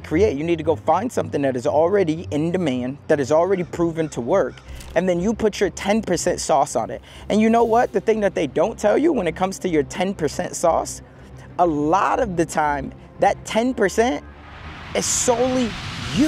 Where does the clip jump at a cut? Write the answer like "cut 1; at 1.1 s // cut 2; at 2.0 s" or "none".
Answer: none